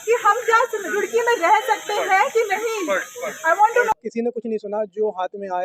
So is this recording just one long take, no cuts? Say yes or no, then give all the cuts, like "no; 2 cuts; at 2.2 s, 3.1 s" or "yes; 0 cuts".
no; 1 cut; at 3.9 s